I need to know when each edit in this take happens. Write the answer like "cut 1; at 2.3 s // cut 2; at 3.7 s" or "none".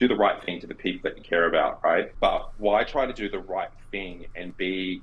cut 1; at 2.1 s